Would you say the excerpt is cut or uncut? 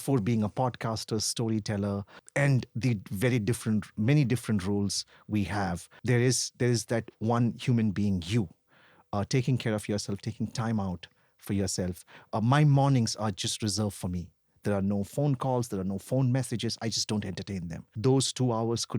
cut